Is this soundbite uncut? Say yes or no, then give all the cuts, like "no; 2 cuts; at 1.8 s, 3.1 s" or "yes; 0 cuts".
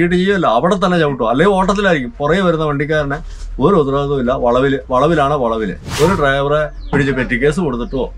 no; 1 cut; at 5.8 s